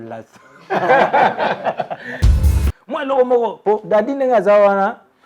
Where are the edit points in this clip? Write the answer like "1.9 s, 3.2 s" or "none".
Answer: 2.4 s